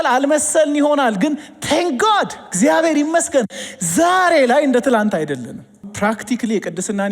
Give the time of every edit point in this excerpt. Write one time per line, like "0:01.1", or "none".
0:05.9